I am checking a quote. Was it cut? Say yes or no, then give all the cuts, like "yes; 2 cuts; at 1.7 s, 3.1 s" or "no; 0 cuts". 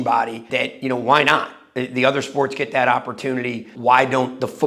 yes; 1 cut; at 3.7 s